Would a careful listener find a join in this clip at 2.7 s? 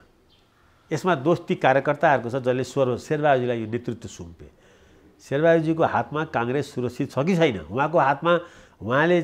no; 0 cuts

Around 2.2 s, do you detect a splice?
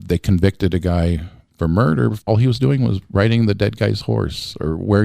yes; 1 cut; at 2.2 s

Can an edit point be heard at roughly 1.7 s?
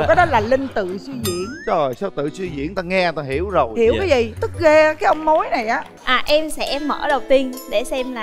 no; 1 cut; at 5.9 s

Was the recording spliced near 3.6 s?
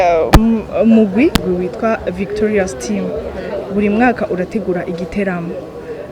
no; 1 cut; at 1.4 s

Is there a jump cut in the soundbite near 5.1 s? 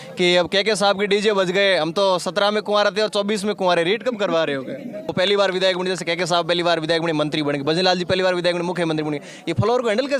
yes; 1 cut; at 5.1 s

